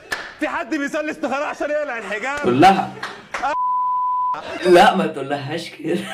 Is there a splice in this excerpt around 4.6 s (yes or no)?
yes